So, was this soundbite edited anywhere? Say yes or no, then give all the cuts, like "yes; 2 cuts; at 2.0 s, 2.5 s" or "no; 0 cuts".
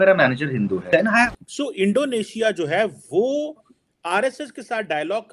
yes; 1 cut; at 1.3 s